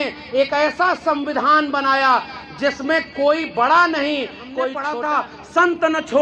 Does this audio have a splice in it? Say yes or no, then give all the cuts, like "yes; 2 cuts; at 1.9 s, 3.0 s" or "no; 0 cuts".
yes; 1 cut; at 4.9 s